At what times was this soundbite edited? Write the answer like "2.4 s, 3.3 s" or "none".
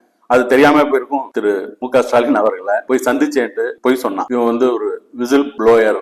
1.2 s, 4.2 s